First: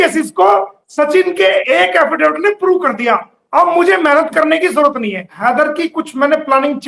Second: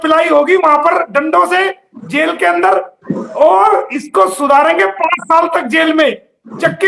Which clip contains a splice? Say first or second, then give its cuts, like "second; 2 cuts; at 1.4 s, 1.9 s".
first; 1 cut; at 5.3 s